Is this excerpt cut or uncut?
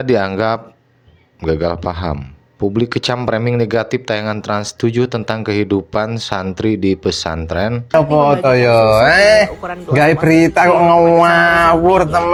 uncut